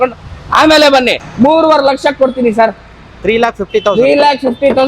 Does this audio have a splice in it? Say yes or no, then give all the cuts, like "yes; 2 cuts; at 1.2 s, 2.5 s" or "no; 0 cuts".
yes; 1 cut; at 1.2 s